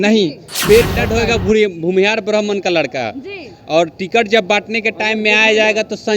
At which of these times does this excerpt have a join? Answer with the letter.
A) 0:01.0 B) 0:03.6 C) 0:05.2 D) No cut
A